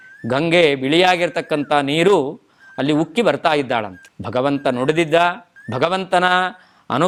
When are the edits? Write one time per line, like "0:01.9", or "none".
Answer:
none